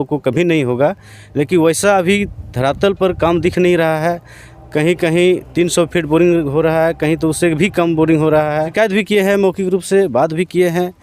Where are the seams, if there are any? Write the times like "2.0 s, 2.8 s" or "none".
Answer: 8.7 s